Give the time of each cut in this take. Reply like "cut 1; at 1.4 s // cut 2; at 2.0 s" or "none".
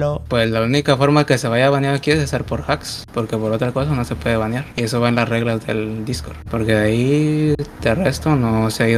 none

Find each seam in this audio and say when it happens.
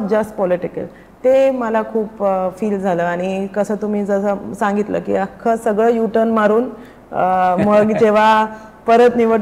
none

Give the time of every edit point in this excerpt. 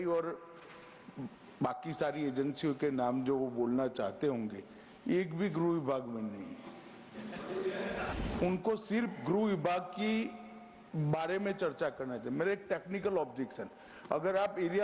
cut 1; at 8.1 s

